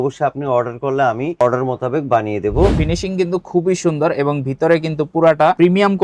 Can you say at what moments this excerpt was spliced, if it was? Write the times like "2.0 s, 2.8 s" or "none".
2.8 s